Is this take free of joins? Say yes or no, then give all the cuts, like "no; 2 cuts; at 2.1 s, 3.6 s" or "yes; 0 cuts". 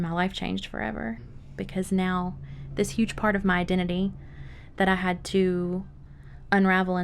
no; 1 cut; at 1.4 s